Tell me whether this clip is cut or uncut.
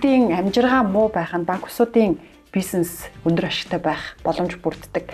uncut